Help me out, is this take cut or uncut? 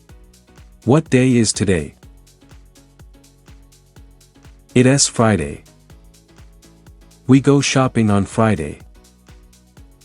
uncut